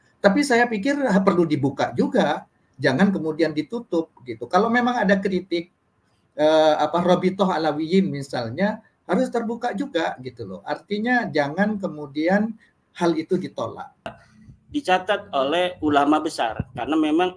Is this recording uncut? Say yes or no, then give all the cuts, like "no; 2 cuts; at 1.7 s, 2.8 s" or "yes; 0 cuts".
no; 1 cut; at 14.1 s